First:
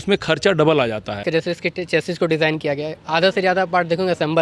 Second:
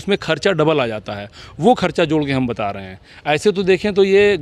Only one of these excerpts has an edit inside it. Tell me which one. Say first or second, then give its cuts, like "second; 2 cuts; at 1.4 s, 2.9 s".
first; 1 cut; at 1.2 s